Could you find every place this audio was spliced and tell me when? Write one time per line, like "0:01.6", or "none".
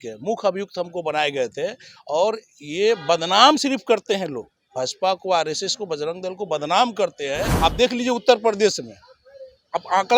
0:07.5